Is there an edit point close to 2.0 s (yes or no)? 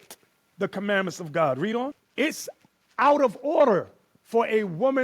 yes